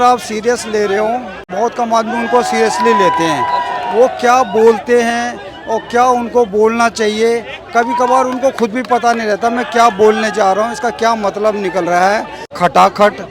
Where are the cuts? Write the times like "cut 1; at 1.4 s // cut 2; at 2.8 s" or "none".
cut 1; at 1.4 s // cut 2; at 12.4 s